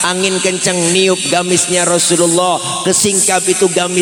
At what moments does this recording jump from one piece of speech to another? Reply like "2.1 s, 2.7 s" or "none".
none